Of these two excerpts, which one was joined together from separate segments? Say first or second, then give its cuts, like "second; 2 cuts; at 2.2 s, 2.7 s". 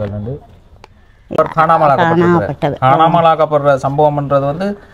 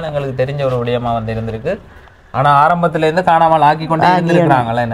first; 1 cut; at 1.4 s